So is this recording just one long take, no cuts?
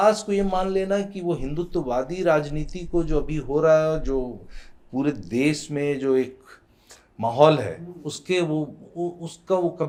yes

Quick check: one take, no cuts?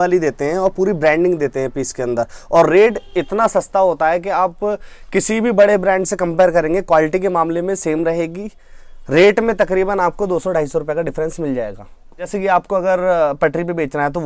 no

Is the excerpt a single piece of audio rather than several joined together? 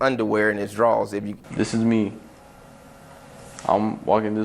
no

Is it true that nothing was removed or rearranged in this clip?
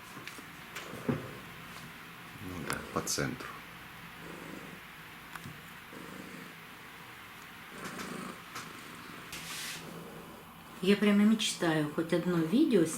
no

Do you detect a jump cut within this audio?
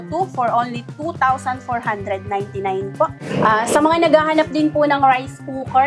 yes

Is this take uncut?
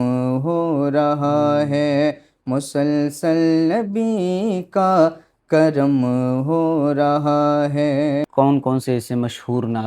no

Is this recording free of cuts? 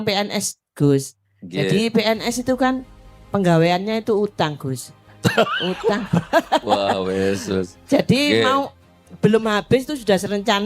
yes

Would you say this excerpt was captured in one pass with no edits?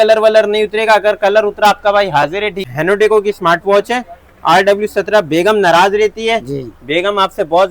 no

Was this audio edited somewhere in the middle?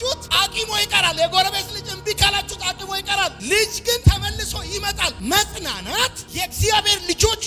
no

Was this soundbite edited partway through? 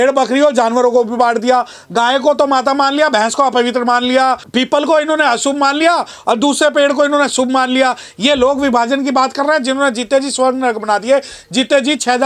no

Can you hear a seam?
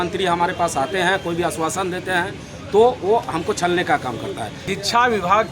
yes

